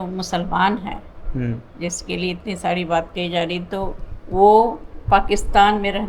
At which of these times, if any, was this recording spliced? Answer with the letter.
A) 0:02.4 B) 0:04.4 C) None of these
C